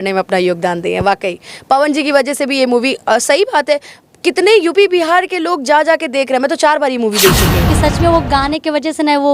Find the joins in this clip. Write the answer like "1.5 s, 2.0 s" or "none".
7.7 s